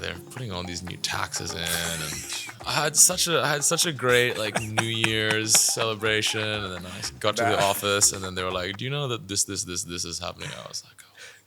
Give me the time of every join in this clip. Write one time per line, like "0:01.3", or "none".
0:02.9